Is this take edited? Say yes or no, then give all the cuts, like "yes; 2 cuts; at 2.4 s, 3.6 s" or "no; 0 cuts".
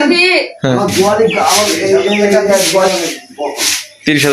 yes; 1 cut; at 2.9 s